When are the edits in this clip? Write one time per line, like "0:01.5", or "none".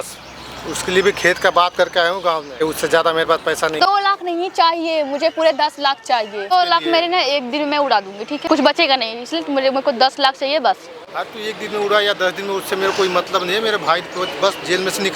0:02.6
0:03.8
0:06.5
0:08.4